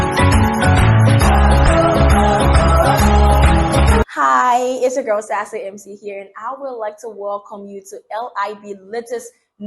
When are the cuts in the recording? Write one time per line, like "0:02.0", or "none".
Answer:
0:04.0